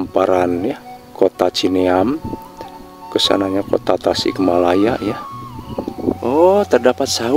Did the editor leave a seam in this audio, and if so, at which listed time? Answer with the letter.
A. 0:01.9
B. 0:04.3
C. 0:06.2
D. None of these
C